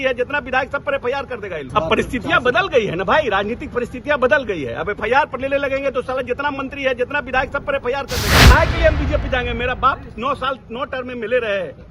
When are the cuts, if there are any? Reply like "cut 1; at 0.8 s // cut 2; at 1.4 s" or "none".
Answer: cut 1; at 1.7 s // cut 2; at 8.5 s